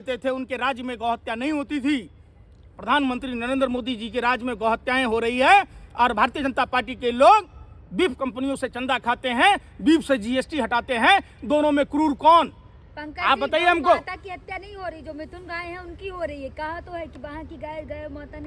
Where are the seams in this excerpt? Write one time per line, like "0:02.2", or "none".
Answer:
none